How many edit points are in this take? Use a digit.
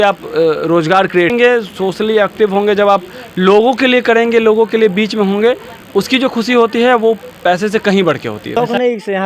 2